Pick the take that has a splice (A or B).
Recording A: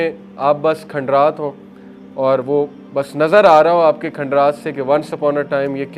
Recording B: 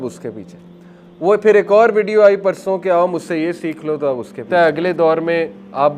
B